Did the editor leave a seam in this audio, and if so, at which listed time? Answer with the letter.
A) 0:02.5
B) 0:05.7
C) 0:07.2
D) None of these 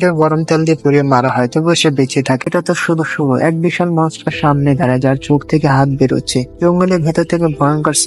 A